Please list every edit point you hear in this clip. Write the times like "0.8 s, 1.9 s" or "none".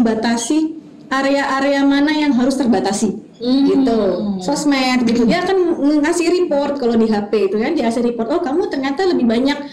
none